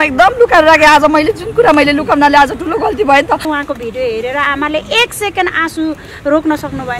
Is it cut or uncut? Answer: cut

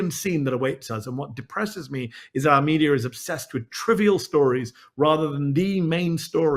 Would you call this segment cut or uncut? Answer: uncut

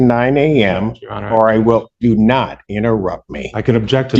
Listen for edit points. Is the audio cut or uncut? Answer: uncut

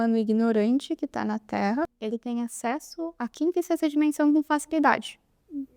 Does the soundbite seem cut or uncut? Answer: cut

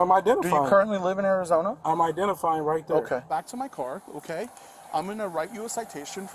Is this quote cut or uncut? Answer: cut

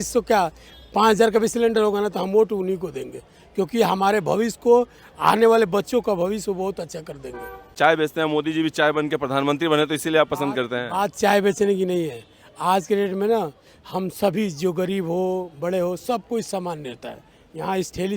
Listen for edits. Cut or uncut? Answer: cut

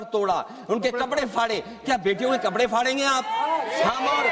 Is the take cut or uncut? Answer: uncut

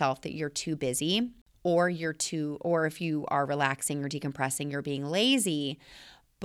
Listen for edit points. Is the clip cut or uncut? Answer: cut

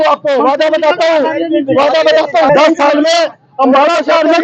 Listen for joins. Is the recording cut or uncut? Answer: cut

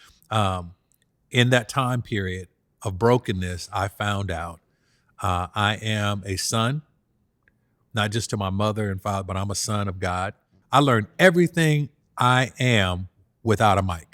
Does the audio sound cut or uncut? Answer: cut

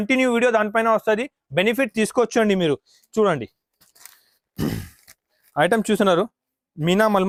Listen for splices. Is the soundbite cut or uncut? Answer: uncut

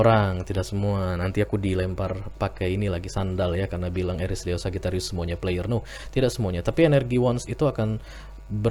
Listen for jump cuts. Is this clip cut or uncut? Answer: uncut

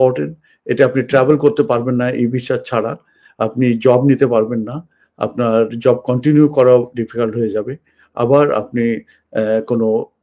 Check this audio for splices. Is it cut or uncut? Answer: uncut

